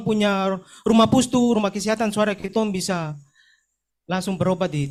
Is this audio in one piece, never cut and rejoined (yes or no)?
yes